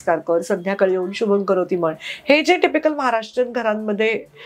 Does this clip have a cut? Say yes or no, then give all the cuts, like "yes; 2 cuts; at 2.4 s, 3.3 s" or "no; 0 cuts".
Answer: no; 0 cuts